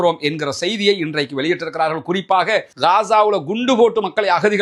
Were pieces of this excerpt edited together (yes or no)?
yes